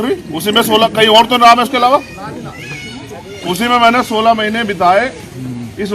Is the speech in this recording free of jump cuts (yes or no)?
yes